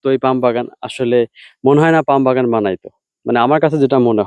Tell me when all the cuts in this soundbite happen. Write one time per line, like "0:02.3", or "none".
none